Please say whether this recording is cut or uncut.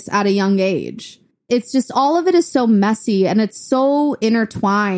cut